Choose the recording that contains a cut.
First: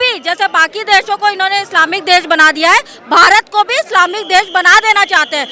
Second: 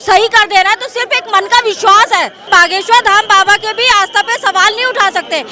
second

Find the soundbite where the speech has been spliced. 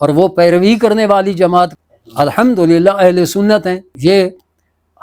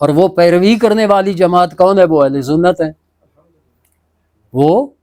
first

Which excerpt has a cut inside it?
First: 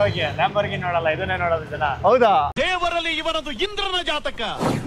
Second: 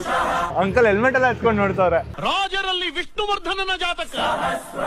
first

